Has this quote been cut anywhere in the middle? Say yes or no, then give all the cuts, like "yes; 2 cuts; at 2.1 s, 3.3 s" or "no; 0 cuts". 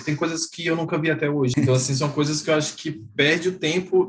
yes; 1 cut; at 1.5 s